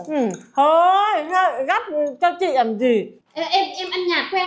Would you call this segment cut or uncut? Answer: cut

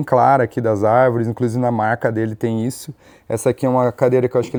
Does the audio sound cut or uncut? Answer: uncut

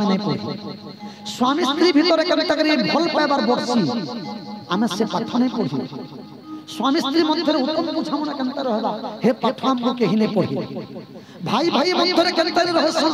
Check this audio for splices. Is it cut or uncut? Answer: uncut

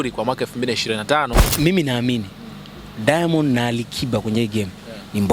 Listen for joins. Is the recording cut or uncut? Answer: cut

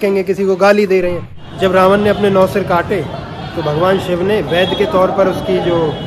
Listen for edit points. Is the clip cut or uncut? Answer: cut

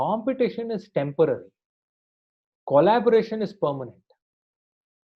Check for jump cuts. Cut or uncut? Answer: uncut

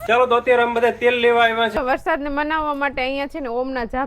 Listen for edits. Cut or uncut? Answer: cut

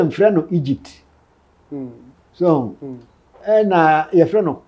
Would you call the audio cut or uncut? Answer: uncut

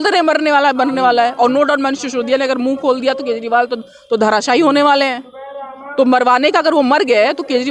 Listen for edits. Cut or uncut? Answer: uncut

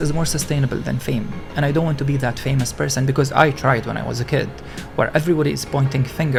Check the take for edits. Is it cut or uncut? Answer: uncut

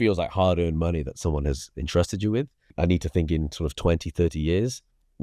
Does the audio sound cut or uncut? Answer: uncut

